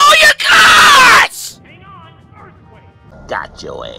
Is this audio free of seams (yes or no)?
no